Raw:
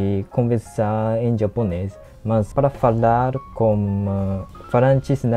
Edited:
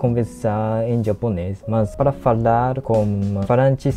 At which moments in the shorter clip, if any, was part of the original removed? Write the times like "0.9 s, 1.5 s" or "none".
1.5 s, 3.0 s